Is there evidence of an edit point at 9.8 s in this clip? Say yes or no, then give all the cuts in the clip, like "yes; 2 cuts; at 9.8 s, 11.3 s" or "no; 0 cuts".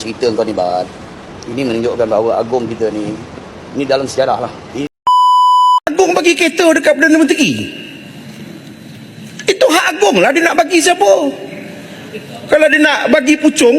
no; 2 cuts; at 4.8 s, 5.9 s